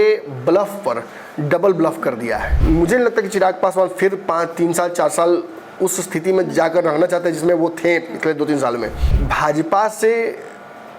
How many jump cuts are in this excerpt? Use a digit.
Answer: 2